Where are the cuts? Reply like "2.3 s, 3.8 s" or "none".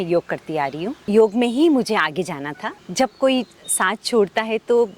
0.9 s, 2.8 s

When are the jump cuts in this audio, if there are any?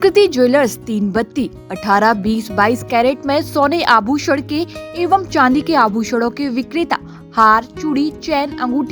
none

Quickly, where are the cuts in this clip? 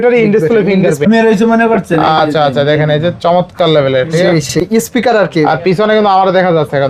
1.1 s, 4.6 s

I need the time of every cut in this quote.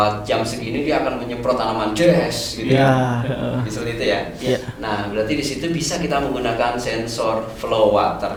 none

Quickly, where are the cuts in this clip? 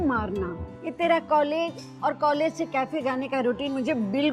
1.0 s

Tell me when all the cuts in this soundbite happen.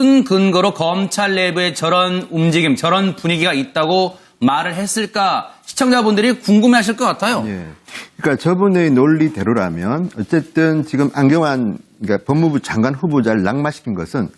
none

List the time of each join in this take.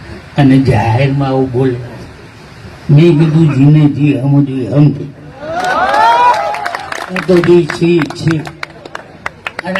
none

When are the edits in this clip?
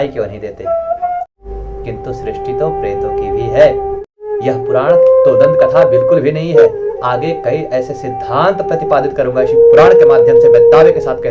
1.3 s, 4.1 s

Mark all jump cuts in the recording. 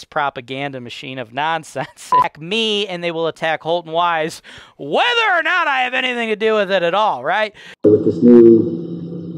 2.2 s

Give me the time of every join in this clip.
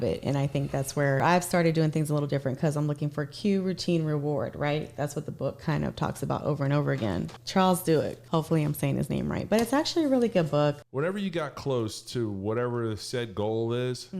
1.2 s, 7.4 s, 8.2 s, 10.8 s

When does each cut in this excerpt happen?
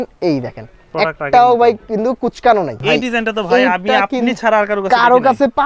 2.8 s

